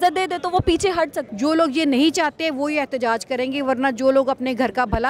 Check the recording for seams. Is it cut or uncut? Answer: cut